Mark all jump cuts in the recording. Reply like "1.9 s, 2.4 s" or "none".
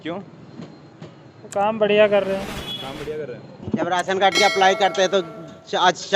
3.6 s